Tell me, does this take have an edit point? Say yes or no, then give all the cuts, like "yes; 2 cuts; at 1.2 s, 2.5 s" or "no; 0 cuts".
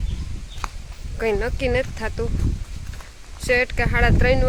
no; 0 cuts